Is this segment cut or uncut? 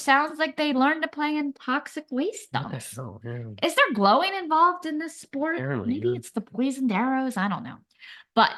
uncut